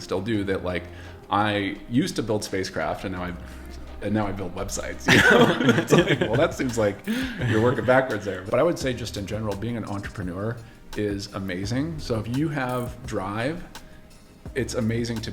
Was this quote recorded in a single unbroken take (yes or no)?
no